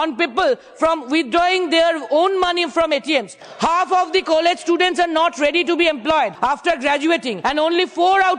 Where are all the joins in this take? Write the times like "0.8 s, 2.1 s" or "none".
3.4 s, 6.3 s, 7.3 s